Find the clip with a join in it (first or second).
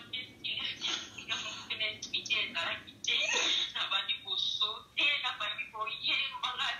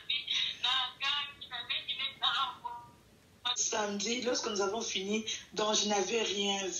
second